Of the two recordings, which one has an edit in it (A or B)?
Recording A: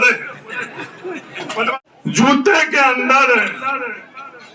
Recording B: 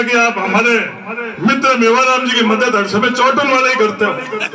A